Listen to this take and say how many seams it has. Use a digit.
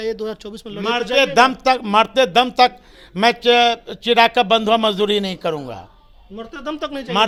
0